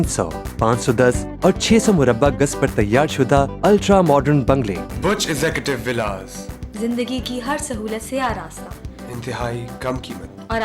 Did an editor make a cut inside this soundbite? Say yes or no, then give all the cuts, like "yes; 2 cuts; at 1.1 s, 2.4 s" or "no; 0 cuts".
yes; 1 cut; at 4.8 s